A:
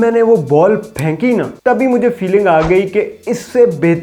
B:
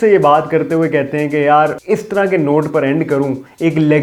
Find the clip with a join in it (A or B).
A